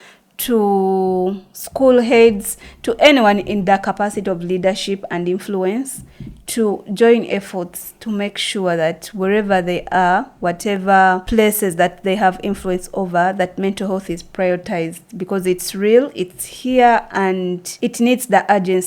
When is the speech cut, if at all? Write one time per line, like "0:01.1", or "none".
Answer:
0:11.2
0:17.6